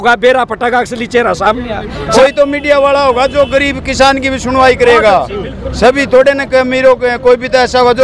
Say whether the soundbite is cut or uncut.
cut